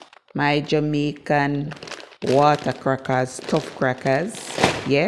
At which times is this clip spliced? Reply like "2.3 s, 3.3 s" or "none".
none